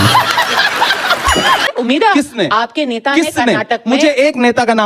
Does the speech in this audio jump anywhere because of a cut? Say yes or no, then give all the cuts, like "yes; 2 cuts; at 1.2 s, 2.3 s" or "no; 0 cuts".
yes; 1 cut; at 2.1 s